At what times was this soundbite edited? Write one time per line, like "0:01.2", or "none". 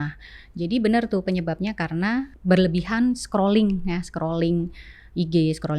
0:02.3

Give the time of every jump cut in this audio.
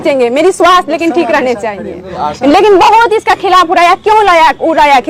none

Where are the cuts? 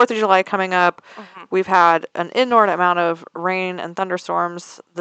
none

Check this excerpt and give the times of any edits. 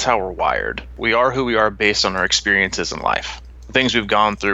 0:01.0

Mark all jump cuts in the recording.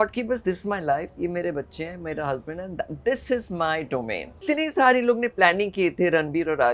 0:04.4

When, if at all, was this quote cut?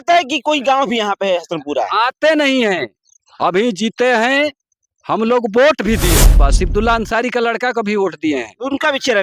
0:06.4

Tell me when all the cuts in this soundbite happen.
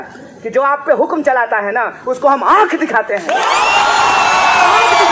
none

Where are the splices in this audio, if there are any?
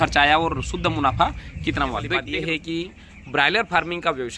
0:02.3

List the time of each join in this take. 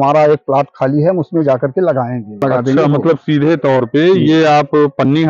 0:02.4

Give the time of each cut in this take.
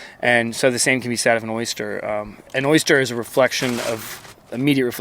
0:02.5

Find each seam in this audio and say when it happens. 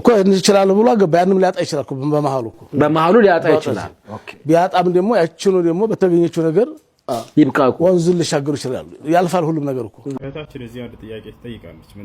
0:10.2

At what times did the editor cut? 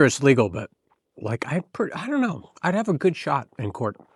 none

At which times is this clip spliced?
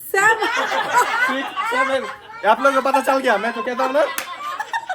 0:01.6

